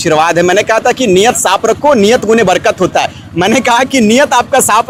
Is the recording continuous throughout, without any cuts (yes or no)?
yes